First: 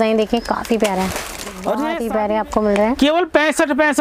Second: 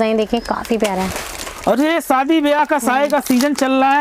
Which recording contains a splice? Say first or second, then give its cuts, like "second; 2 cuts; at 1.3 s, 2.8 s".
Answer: first; 1 cut; at 1.9 s